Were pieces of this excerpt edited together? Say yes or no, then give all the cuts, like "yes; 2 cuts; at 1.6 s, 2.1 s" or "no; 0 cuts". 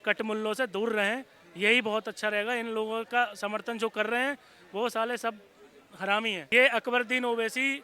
yes; 1 cut; at 6.4 s